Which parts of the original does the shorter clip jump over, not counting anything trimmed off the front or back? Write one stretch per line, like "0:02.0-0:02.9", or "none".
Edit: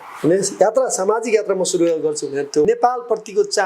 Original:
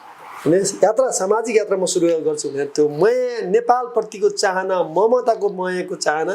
0:02.9-0:03.5